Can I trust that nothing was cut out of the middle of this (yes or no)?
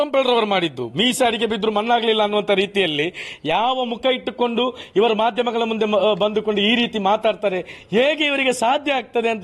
yes